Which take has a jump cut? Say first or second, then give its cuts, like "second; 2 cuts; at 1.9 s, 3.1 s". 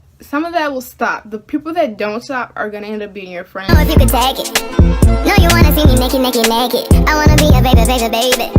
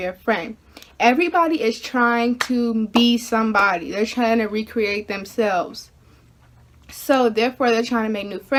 first; 1 cut; at 3.5 s